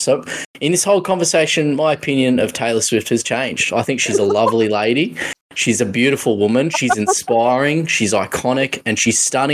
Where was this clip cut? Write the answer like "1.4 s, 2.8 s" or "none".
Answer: none